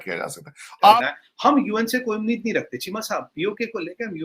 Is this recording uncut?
no; 1 cut; at 0.9 s

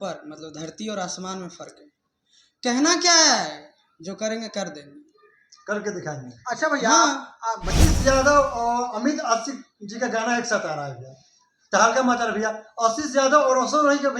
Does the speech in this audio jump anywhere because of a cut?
yes; 1 cut; at 7.7 s

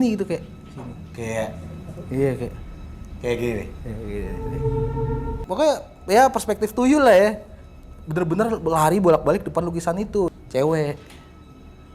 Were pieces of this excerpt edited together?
yes; 2 cuts; at 5.3 s, 10.3 s

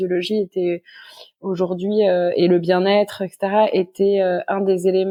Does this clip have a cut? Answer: no; 0 cuts

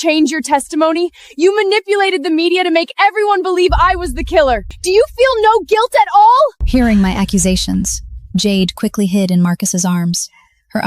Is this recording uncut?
no; 1 cut; at 4.7 s

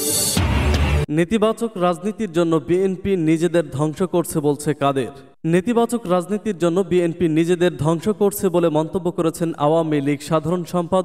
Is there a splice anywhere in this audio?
yes; 1 cut; at 1.0 s

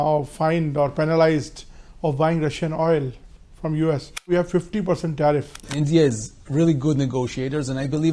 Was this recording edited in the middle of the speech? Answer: yes; 2 cuts; at 4.3 s, 5.7 s

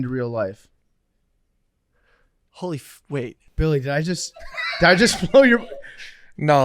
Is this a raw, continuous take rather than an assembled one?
no; 1 cut; at 3.4 s

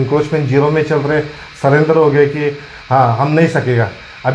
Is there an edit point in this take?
no; 0 cuts

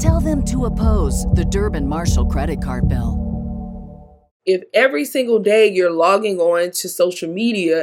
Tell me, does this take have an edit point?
yes; 1 cut; at 4.3 s

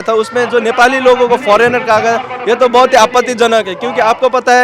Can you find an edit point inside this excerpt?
no; 0 cuts

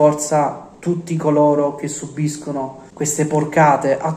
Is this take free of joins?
no; 1 cut; at 2.8 s

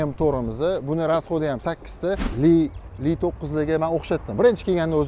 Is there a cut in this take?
yes; 1 cut; at 2.3 s

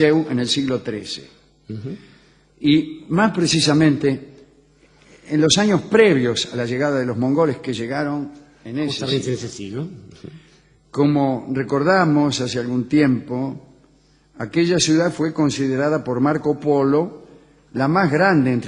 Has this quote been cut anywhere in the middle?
yes; 1 cut; at 5.6 s

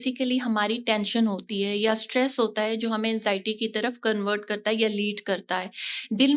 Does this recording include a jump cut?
no; 0 cuts

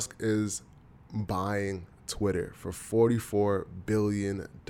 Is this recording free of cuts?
yes; 0 cuts

